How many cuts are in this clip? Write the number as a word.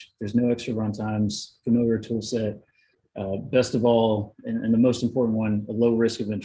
zero